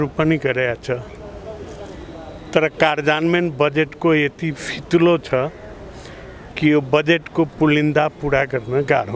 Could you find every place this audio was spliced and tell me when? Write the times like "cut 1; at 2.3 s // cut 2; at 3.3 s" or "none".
none